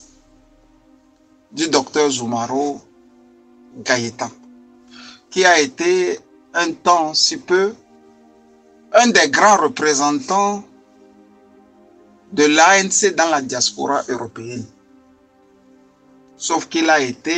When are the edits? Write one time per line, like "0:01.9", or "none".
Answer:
0:10.7
0:12.3
0:14.7
0:16.5